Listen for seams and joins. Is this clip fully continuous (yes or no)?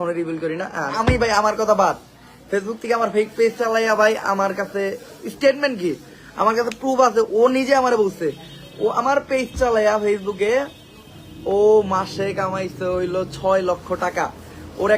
no